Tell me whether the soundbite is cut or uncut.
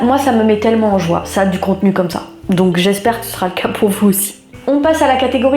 uncut